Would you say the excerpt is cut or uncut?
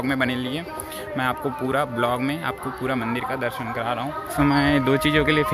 cut